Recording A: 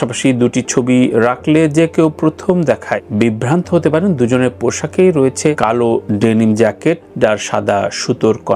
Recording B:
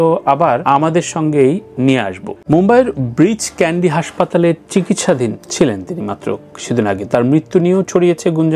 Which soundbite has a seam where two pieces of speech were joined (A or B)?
B